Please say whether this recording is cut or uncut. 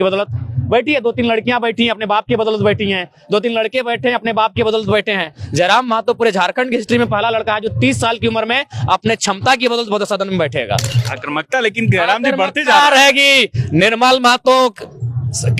cut